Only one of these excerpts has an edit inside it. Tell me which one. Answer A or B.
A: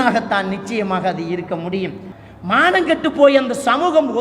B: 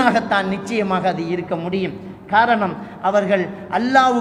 A